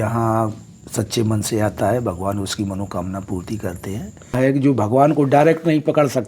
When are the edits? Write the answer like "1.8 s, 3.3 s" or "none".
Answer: 4.3 s